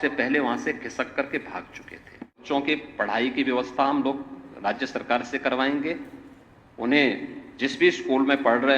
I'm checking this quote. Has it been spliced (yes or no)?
yes